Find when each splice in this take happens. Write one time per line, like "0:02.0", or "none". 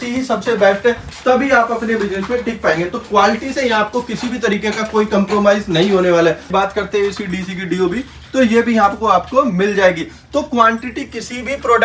0:06.4